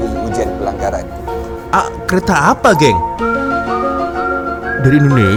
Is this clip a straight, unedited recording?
yes; 0 cuts

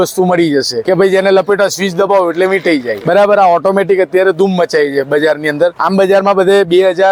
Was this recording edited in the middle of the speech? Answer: no; 0 cuts

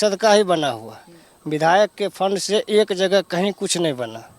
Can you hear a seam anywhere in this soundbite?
no; 0 cuts

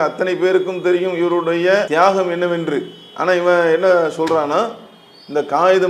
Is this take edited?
yes; 1 cut; at 1.9 s

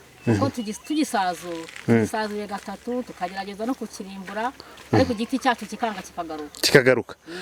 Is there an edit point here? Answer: no; 0 cuts

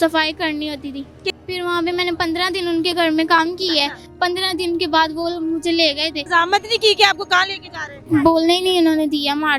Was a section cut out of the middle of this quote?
yes; 3 cuts; at 1.2 s, 6.2 s, 7.9 s

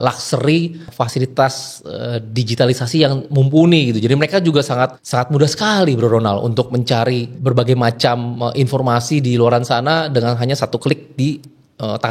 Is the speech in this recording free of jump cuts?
no; 3 cuts; at 0.9 s, 5.0 s, 7.4 s

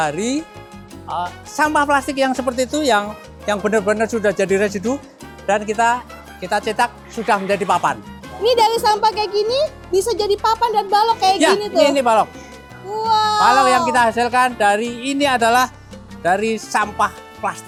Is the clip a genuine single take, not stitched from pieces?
yes; 0 cuts

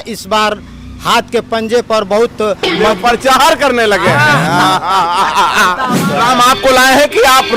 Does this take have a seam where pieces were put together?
yes; 1 cut; at 5.9 s

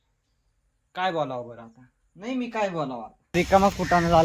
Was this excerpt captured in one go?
no; 1 cut; at 3.4 s

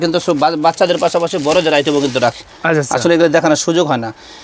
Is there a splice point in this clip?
no; 0 cuts

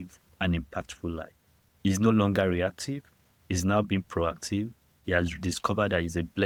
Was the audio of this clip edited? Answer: no; 0 cuts

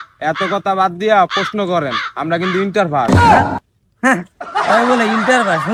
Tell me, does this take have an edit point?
no; 0 cuts

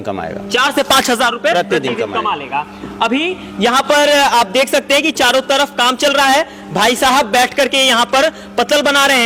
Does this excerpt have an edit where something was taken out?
no; 0 cuts

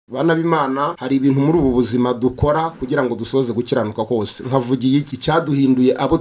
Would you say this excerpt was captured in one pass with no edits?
no; 2 cuts; at 1.0 s, 5.1 s

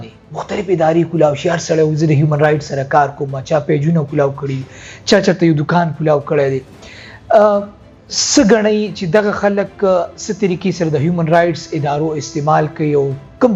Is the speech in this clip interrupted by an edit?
no; 0 cuts

